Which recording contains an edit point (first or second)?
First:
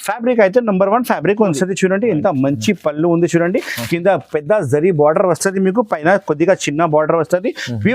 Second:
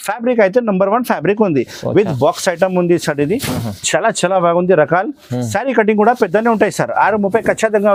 first